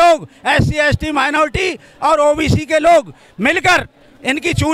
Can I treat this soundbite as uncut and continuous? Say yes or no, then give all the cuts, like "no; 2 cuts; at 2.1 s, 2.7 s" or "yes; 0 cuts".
yes; 0 cuts